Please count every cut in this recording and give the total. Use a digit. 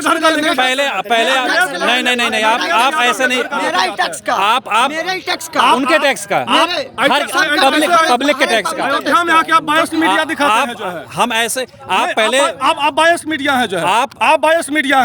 0